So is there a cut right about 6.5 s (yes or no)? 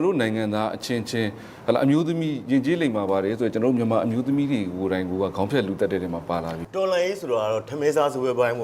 yes